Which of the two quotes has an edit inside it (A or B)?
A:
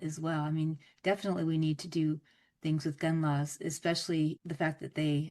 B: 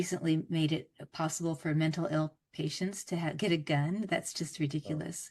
A